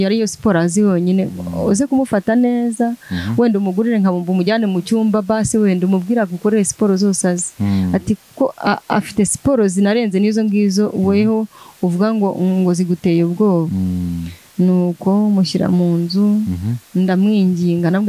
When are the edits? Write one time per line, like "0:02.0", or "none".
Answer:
none